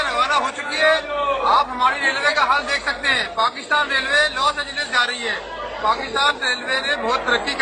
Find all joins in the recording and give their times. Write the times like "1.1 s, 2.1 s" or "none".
none